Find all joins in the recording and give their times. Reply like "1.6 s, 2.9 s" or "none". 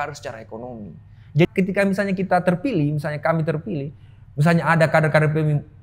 1.5 s